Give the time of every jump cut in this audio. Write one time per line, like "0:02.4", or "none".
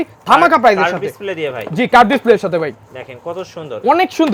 none